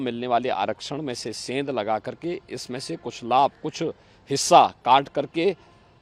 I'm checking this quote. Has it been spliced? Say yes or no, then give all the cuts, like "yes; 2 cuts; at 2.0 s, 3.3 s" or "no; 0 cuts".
no; 0 cuts